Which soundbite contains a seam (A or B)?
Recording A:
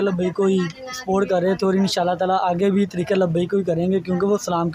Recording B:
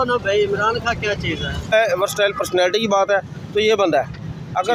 B